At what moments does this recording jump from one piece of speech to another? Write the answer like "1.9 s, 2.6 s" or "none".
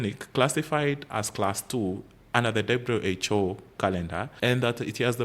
4.2 s